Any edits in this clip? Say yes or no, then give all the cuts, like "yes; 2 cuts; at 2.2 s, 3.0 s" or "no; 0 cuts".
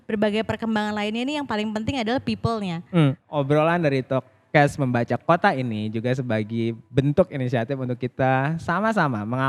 yes; 1 cut; at 3.2 s